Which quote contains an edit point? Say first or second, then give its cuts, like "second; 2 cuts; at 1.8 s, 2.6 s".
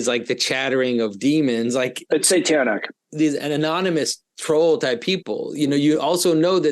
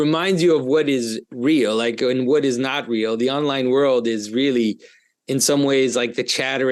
first; 2 cuts; at 2.0 s, 3.0 s